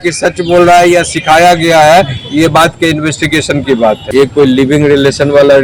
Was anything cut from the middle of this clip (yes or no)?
yes